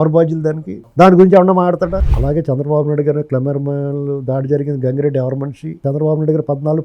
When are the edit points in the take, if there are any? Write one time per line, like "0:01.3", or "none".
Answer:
0:02.0
0:05.8

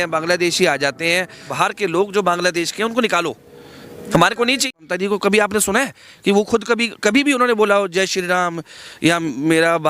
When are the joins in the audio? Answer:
0:01.4
0:04.8

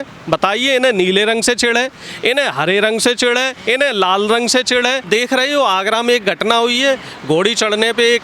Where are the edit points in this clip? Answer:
0:05.0

